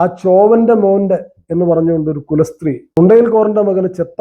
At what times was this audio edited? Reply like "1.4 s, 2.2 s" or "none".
3.0 s